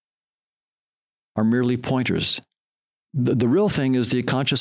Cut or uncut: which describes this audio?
uncut